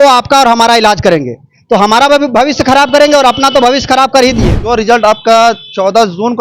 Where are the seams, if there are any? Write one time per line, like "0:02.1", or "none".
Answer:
0:04.6